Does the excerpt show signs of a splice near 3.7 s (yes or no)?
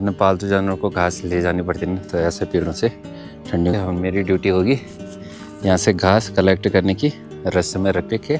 yes